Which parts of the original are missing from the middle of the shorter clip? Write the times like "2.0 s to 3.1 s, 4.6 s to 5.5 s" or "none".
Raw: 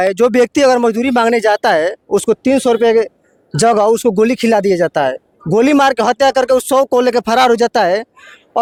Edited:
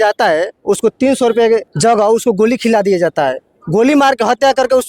3.1 s to 3.5 s